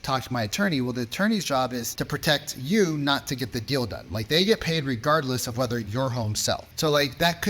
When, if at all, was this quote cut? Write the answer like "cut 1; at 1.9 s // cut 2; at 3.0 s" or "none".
cut 1; at 1.9 s // cut 2; at 6.7 s